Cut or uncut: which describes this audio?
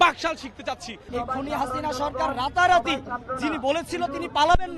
cut